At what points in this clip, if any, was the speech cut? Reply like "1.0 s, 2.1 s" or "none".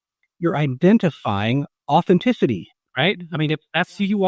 2.8 s